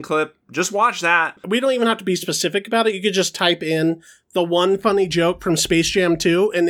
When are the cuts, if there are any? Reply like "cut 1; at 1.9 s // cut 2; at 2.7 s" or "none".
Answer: cut 1; at 1.4 s